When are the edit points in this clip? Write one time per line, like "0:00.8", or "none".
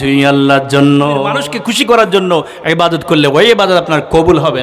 0:01.3